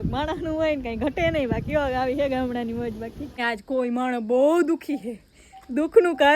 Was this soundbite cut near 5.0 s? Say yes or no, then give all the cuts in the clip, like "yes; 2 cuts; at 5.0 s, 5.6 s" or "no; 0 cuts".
no; 1 cut; at 3.4 s